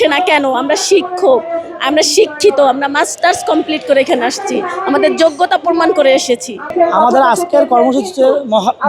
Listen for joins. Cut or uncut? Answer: uncut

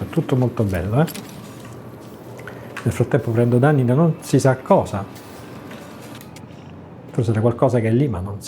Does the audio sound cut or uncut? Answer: cut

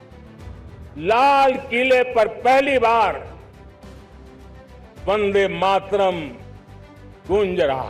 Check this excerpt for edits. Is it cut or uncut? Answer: cut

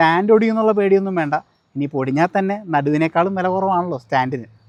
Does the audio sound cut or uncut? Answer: uncut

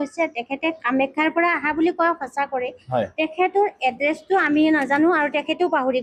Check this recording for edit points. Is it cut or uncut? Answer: uncut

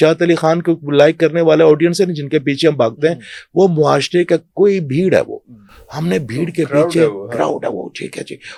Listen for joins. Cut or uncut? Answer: uncut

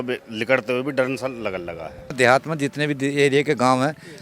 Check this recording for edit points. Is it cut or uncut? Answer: cut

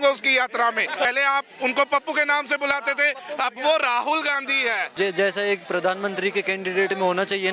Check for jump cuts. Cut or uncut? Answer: cut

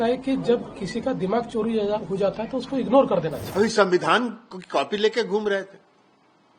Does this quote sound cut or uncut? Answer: cut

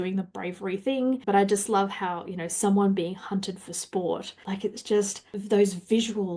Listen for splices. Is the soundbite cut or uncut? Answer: cut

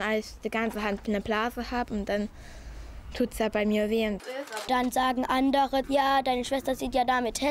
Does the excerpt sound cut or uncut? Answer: cut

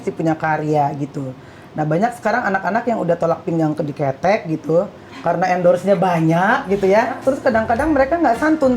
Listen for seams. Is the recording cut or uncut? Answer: cut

